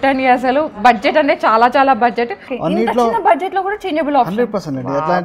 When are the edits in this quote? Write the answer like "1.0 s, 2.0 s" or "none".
2.5 s